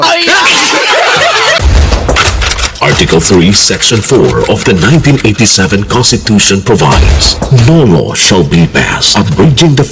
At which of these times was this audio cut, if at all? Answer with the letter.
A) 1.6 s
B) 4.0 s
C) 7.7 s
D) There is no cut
A